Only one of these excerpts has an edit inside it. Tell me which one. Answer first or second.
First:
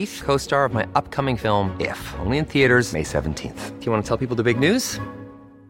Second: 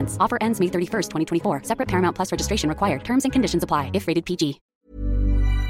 second